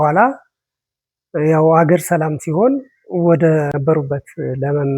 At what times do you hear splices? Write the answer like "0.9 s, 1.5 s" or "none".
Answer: 3.7 s